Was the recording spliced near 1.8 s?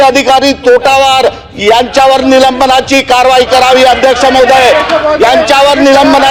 no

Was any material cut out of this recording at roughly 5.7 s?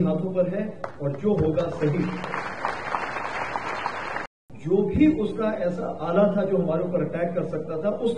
no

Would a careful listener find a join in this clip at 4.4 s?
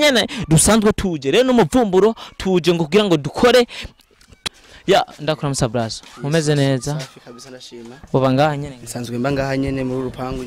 yes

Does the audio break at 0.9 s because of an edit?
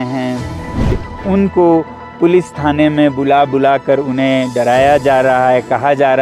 yes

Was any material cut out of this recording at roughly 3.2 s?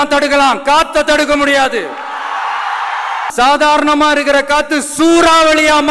yes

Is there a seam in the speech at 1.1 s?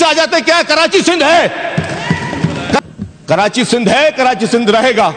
no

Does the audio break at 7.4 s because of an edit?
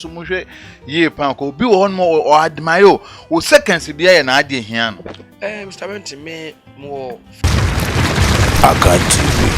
yes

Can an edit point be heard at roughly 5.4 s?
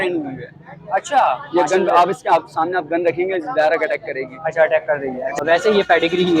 yes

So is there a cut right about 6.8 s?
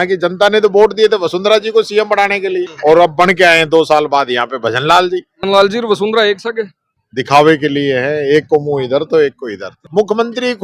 no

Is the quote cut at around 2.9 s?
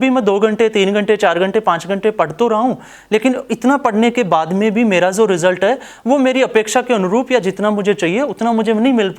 no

